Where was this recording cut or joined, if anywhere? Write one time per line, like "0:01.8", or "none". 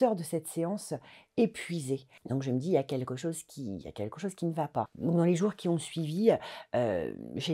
0:02.1
0:04.9